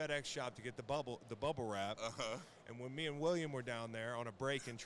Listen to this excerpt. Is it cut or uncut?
uncut